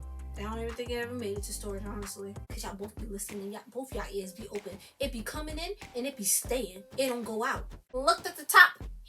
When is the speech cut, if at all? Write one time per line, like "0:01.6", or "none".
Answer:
0:02.4
0:07.9